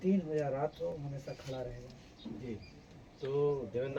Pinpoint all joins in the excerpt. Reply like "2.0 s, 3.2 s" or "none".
none